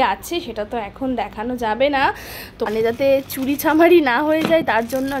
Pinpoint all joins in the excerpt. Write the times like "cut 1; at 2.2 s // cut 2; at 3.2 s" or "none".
cut 1; at 2.7 s